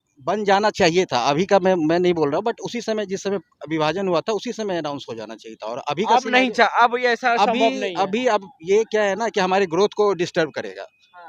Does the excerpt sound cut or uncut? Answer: uncut